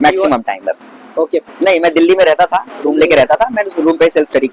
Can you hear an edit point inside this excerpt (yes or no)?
yes